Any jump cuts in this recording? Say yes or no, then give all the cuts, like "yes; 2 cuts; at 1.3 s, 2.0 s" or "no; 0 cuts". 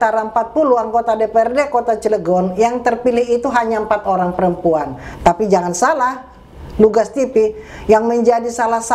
no; 0 cuts